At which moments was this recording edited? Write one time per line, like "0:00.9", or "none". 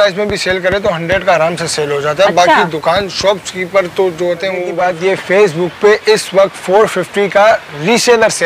0:04.7